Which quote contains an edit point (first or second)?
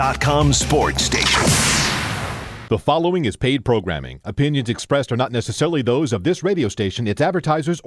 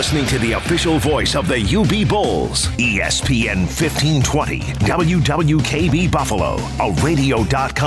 first